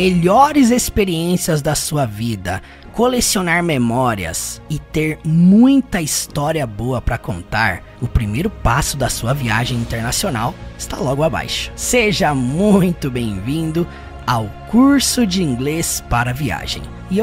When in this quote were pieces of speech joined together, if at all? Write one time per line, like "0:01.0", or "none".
none